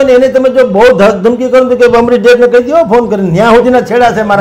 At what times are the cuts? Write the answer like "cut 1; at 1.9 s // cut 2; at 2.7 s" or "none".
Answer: none